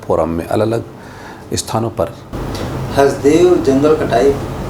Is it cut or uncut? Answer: cut